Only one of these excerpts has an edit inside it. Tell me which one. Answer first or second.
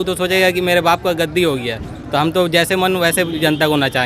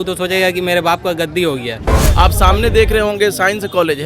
second